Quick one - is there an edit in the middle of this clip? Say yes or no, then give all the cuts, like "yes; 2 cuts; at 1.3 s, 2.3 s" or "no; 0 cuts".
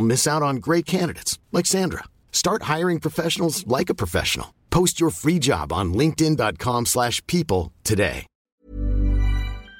yes; 1 cut; at 8.5 s